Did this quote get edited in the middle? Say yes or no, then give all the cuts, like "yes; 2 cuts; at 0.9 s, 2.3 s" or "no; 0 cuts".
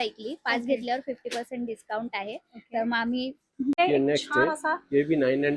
yes; 1 cut; at 3.8 s